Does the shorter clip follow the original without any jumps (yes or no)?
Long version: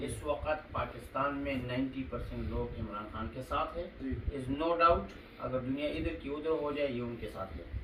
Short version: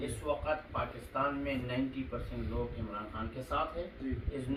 yes